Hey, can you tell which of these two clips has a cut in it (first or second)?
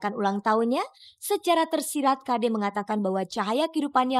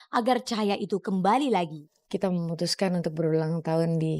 second